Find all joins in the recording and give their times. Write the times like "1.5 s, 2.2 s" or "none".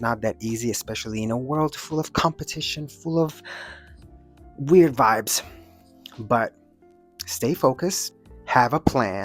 none